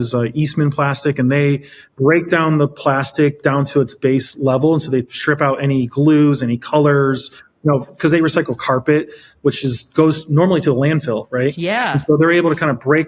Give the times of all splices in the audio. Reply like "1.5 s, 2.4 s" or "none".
none